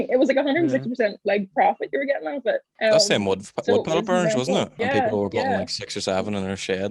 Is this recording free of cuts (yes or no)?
no